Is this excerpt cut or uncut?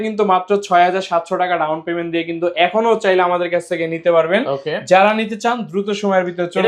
uncut